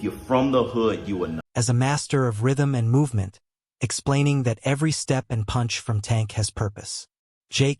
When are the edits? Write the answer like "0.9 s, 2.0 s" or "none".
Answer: 1.5 s